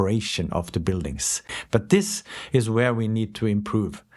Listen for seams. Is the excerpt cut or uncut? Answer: cut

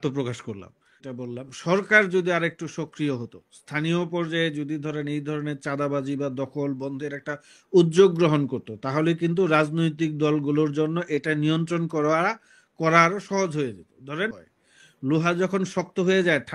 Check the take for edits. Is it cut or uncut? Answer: cut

